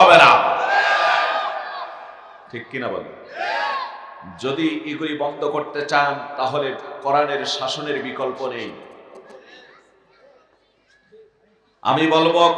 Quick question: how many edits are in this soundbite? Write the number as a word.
zero